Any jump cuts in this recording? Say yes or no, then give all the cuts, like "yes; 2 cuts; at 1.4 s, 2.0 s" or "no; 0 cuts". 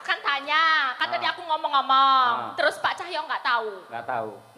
no; 0 cuts